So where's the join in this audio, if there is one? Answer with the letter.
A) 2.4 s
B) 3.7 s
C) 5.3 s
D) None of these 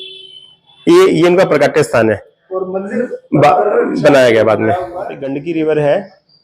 C